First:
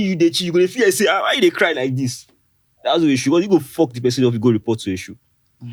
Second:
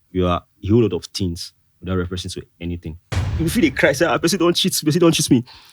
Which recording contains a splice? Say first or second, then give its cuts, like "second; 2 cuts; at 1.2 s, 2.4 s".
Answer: second; 1 cut; at 3.3 s